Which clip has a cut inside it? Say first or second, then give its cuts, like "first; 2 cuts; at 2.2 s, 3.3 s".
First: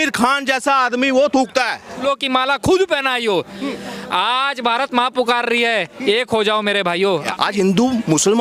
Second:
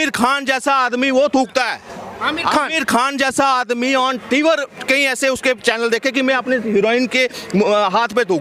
first; 2 cuts; at 2.0 s, 7.3 s